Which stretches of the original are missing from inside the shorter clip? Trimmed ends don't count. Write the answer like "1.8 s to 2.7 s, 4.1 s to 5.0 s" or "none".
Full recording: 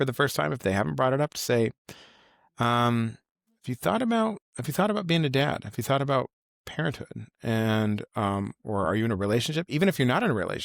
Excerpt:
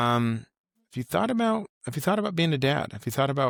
none